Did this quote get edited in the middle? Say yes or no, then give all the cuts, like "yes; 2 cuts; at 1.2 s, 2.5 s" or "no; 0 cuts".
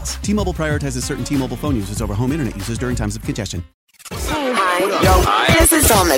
yes; 1 cut; at 4.1 s